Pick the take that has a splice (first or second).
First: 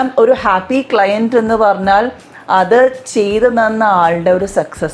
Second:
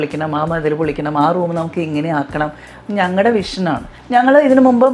second